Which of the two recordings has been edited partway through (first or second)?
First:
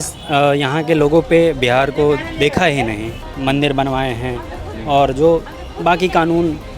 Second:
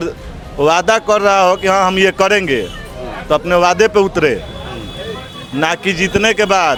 first